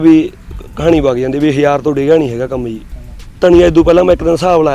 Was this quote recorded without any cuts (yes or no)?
yes